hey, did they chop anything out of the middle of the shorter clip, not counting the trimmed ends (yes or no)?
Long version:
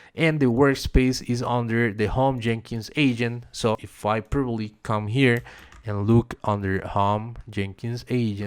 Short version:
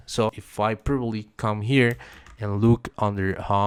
no